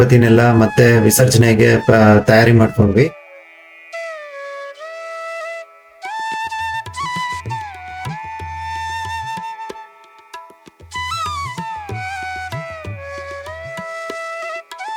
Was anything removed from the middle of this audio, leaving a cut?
no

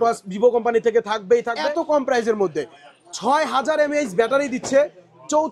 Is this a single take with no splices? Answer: no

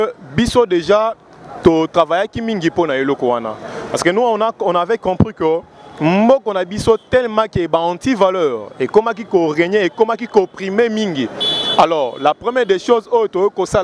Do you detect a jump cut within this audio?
no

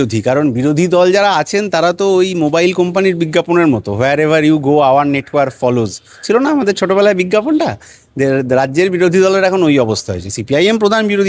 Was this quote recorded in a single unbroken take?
yes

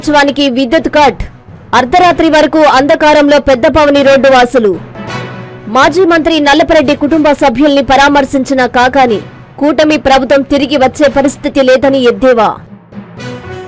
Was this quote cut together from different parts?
yes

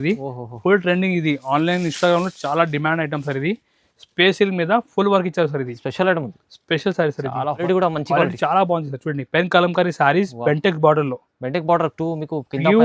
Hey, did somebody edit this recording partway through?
yes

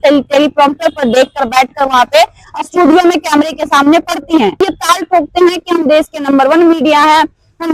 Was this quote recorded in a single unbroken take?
no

